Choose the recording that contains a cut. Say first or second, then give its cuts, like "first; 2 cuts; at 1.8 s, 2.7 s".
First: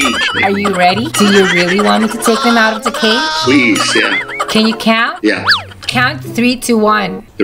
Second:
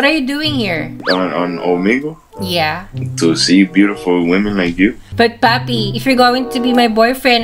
second; 1 cut; at 5.1 s